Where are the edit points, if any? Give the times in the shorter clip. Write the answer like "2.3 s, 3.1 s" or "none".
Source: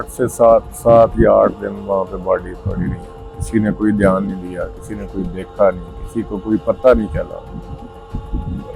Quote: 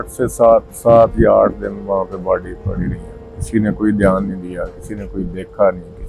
none